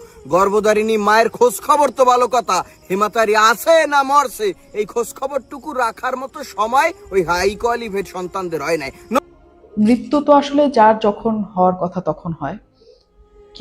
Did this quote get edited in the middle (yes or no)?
yes